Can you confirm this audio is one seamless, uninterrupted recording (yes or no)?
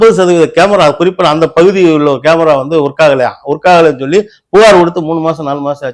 yes